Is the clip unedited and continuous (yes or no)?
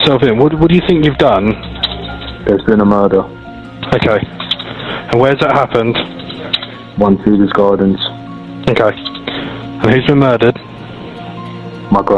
yes